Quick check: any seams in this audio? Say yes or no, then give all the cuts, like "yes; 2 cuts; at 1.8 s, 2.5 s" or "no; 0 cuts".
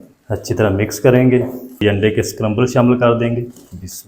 yes; 1 cut; at 1.7 s